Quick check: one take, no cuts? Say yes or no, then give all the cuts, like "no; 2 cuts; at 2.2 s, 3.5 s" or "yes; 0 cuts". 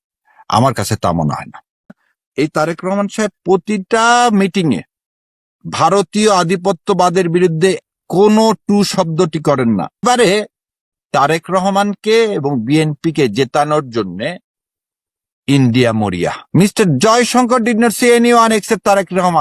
no; 3 cuts; at 2.0 s, 10.0 s, 16.4 s